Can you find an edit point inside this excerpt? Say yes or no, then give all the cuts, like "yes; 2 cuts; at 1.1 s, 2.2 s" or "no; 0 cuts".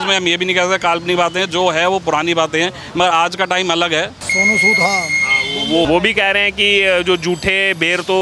yes; 2 cuts; at 4.2 s, 5.8 s